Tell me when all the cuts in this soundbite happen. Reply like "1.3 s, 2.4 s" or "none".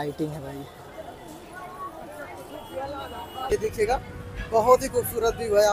3.5 s